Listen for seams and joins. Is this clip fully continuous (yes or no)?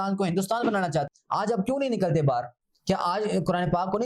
no